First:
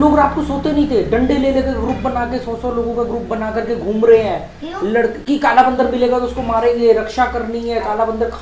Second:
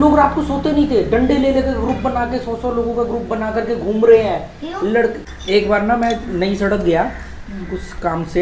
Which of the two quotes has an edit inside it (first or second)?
second